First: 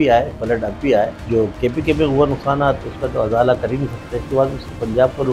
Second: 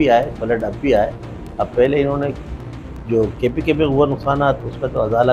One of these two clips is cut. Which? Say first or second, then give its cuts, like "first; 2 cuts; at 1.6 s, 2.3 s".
first; 2 cuts; at 1.2 s, 4.2 s